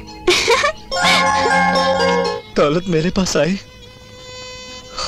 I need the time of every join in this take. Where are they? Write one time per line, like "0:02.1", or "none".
0:02.3